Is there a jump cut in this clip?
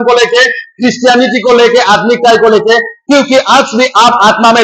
no; 0 cuts

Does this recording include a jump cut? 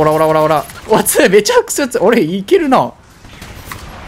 no; 0 cuts

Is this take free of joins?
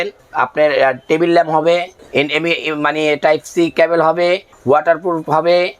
no; 1 cut; at 4.5 s

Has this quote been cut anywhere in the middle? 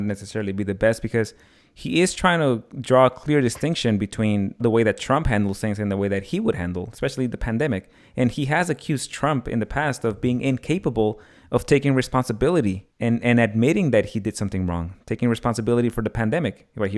yes; 2 cuts; at 4.6 s, 12.9 s

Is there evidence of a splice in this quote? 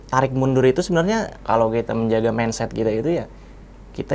yes; 1 cut; at 1.3 s

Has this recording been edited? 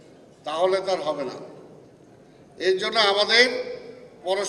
no; 0 cuts

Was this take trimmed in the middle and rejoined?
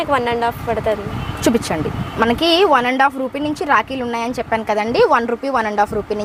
no; 0 cuts

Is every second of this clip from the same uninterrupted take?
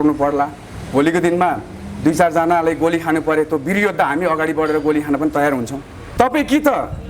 no; 1 cut; at 6.0 s

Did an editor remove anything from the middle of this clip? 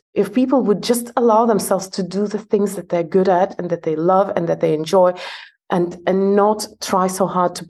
no; 0 cuts

